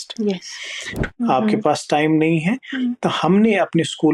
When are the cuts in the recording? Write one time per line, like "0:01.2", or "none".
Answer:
0:01.0